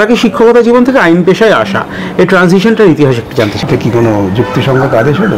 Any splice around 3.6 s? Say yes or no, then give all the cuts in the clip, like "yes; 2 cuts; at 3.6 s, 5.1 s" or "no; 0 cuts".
yes; 1 cut; at 3.6 s